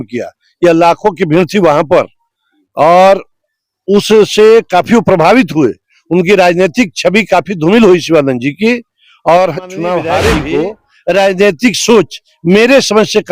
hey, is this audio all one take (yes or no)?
no